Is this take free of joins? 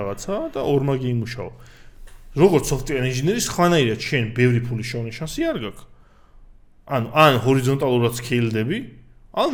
yes; 0 cuts

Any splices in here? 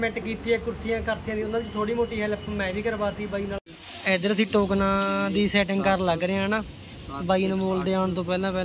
yes; 1 cut; at 3.6 s

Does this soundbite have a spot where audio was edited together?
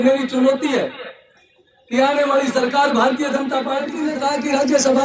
yes; 1 cut; at 3.9 s

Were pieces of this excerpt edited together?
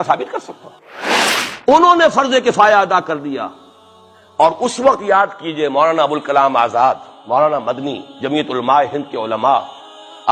no; 0 cuts

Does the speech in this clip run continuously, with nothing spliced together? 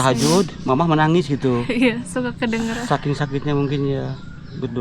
yes; 0 cuts

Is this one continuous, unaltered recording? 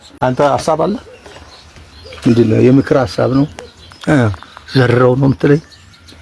yes; 0 cuts

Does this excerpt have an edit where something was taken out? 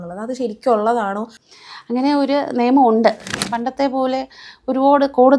yes; 2 cuts; at 1.3 s, 3.3 s

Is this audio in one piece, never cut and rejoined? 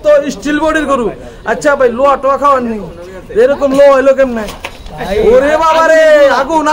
yes; 0 cuts

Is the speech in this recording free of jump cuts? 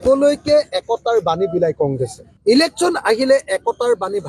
no; 1 cut; at 2.2 s

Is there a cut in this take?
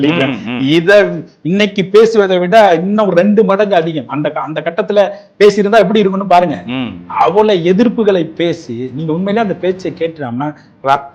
no; 0 cuts

